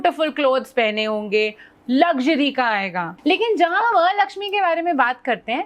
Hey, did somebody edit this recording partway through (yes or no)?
yes